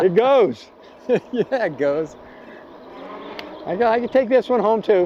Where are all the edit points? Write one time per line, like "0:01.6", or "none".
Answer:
none